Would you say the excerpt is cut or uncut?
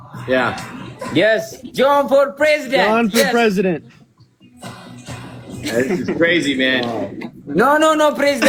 uncut